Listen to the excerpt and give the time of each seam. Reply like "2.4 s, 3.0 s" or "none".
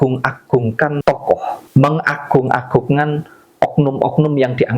1.1 s